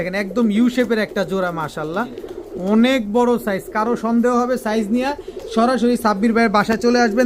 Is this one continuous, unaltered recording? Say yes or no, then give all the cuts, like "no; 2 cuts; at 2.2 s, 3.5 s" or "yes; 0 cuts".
yes; 0 cuts